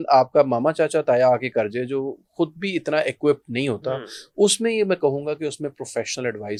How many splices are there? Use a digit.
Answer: 0